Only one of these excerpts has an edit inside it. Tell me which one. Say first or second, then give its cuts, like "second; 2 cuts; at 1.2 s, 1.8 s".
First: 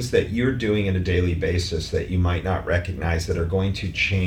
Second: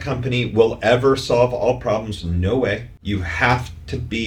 second; 1 cut; at 2.9 s